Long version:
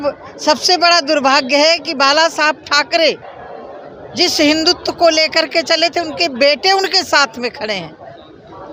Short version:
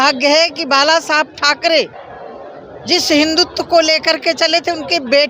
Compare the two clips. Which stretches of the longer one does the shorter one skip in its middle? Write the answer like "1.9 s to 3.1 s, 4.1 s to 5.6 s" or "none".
none